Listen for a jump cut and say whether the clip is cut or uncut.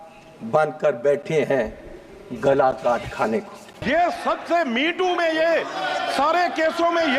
cut